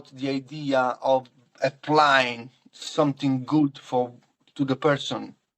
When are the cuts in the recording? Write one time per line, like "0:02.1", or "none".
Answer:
0:01.6